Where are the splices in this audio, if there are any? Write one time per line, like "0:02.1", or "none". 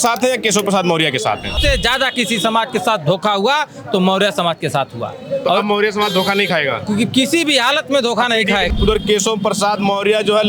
0:01.6
0:08.7